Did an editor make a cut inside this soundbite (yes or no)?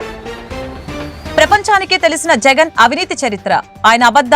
yes